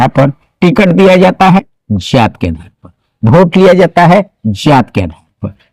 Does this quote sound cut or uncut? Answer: uncut